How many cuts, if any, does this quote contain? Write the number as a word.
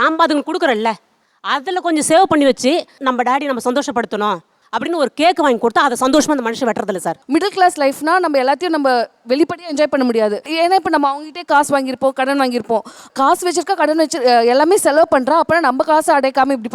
one